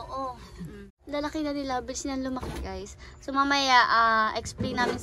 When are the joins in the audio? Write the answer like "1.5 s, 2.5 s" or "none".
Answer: 0.9 s